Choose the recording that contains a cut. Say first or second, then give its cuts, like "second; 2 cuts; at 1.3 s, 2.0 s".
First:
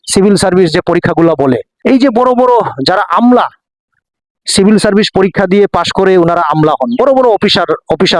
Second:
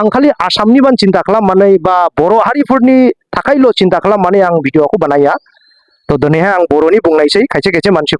first; 1 cut; at 1.7 s